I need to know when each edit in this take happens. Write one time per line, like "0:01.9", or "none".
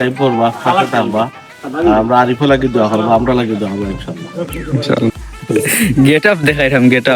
0:05.3

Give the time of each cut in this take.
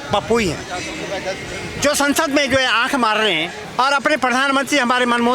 0:03.6

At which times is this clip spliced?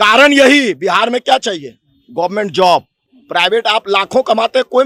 none

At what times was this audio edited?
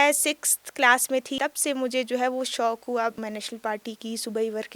0:01.3
0:03.2

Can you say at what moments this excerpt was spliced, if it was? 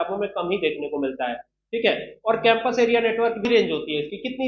0:03.4

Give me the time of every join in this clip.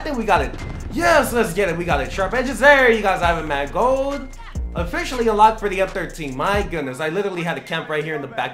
none

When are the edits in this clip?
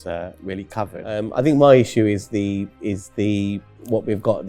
0:01.3

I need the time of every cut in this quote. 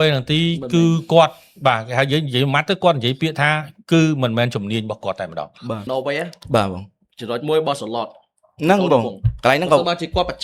0:05.9

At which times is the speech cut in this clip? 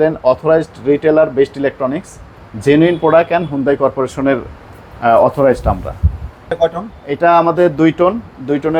none

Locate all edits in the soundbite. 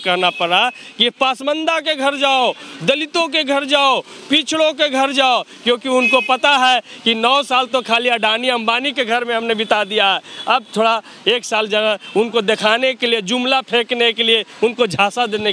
none

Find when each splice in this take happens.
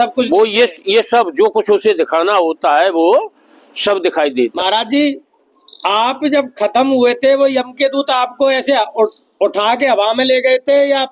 0:04.5

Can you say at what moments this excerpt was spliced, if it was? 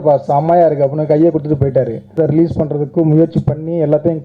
0:02.1

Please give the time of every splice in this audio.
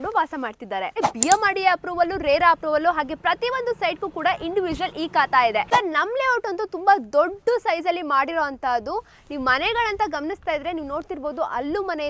0:01.0
0:05.7

